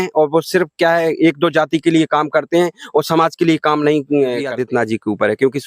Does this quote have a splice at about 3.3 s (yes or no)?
no